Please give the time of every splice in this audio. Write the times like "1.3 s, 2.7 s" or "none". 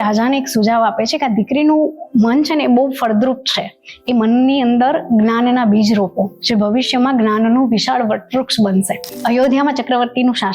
9.1 s

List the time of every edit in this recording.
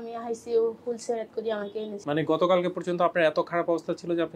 2.0 s

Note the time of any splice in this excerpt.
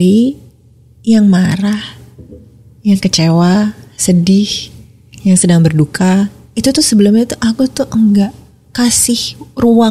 none

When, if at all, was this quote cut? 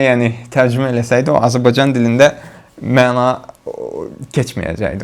none

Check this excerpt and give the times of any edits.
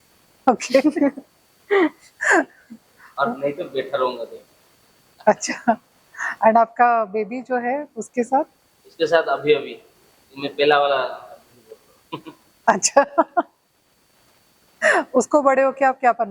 none

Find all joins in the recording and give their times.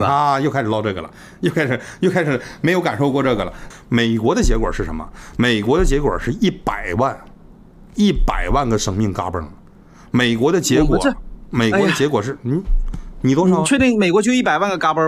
3.6 s

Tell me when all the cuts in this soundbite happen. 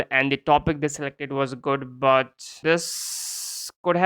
2.6 s

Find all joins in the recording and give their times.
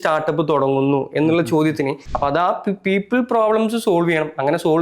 2.0 s

